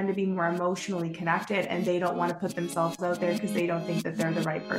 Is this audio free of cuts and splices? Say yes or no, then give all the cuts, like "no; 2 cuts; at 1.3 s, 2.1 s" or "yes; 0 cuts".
yes; 0 cuts